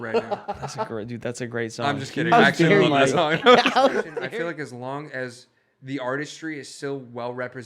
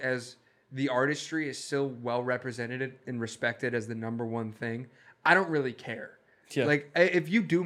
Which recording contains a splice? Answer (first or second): first